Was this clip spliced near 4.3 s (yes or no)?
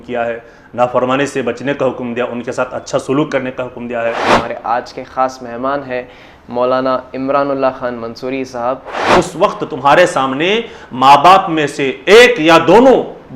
yes